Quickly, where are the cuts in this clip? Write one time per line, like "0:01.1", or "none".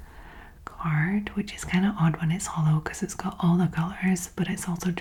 none